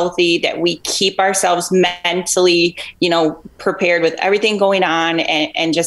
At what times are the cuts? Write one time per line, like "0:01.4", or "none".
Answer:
none